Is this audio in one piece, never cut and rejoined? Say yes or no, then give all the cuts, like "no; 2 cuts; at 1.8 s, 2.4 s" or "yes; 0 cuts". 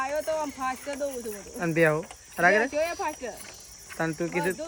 yes; 0 cuts